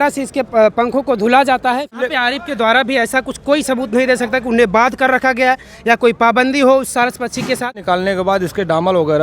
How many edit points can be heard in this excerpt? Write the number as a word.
two